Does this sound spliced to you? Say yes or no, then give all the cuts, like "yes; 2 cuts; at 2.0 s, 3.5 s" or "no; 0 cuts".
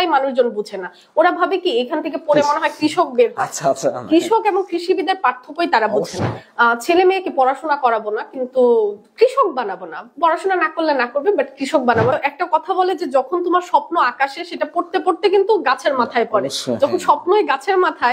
yes; 2 cuts; at 6.4 s, 12.1 s